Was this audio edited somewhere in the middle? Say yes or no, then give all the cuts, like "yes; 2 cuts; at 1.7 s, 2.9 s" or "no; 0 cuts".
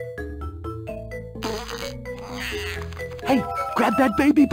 yes; 1 cut; at 3.2 s